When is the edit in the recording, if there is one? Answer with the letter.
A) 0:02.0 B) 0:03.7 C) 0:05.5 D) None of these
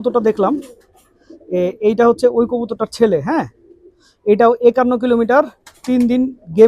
D